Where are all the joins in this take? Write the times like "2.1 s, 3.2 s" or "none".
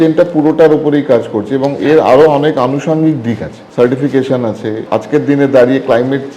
3.6 s, 4.8 s